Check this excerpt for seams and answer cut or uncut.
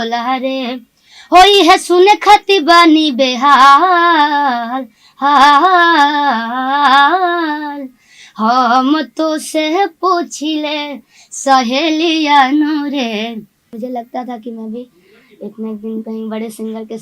cut